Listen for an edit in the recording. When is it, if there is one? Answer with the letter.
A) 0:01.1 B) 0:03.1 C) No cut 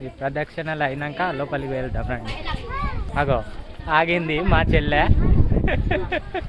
B